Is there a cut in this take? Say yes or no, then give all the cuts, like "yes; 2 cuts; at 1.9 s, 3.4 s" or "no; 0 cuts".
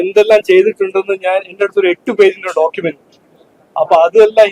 no; 0 cuts